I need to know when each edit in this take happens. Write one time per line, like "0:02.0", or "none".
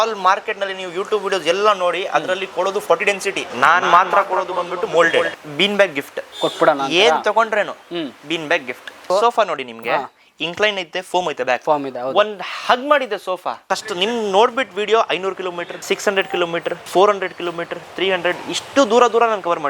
0:05.3
0:09.1
0:13.6
0:15.7
0:16.8